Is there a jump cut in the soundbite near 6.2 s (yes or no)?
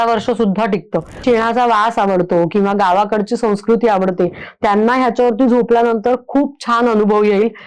no